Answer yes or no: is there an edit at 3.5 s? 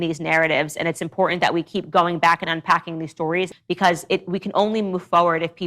yes